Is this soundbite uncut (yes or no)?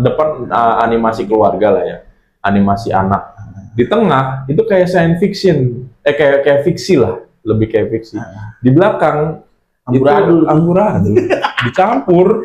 yes